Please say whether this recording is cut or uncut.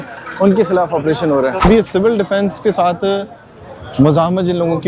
cut